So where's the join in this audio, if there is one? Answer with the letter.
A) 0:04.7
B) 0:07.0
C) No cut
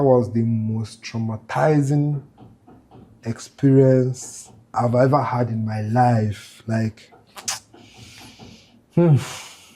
A